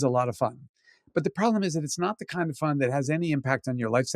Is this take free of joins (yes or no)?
yes